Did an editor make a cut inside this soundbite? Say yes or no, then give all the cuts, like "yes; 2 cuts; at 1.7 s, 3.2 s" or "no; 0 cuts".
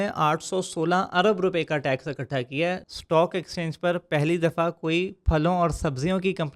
yes; 1 cut; at 2.8 s